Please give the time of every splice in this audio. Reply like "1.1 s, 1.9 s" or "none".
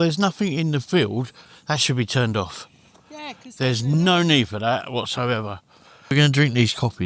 6.1 s